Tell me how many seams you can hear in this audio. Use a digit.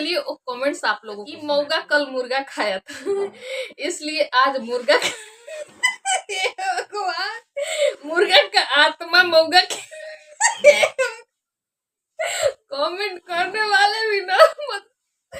1